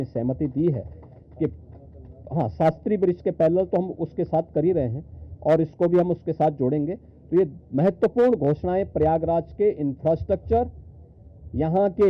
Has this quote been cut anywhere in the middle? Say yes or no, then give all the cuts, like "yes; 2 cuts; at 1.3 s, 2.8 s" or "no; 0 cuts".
no; 0 cuts